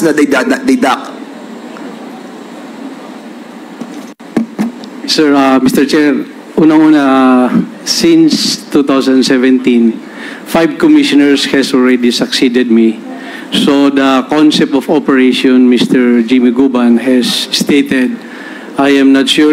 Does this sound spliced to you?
no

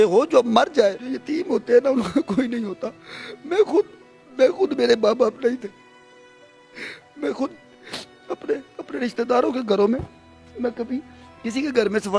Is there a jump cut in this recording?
yes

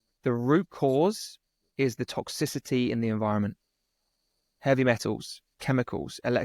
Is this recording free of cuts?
yes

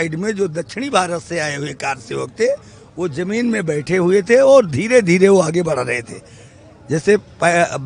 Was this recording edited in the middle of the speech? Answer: no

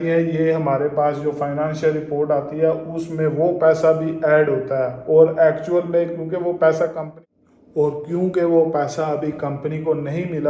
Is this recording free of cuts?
yes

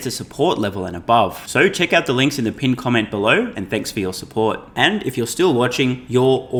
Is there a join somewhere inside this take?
no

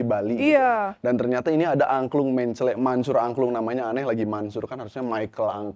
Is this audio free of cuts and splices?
yes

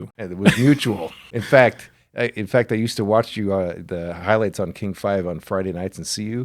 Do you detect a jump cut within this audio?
yes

